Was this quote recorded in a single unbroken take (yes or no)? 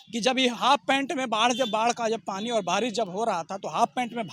yes